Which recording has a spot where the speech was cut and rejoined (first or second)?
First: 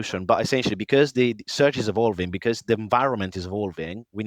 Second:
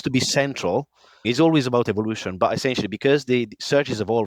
second